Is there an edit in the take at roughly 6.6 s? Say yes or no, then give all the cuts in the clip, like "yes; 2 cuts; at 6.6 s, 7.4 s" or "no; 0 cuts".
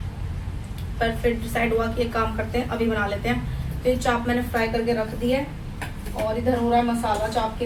no; 0 cuts